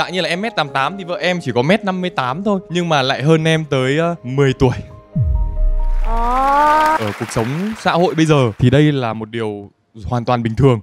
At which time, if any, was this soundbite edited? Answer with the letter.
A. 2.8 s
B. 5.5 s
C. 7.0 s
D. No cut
C